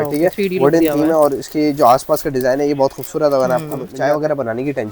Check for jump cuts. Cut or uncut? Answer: cut